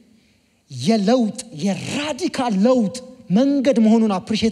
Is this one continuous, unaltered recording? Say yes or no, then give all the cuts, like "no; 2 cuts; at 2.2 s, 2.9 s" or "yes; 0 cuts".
yes; 0 cuts